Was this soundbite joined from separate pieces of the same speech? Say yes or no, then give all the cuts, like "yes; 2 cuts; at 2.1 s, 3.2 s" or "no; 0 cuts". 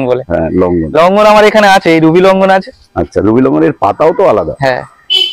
no; 0 cuts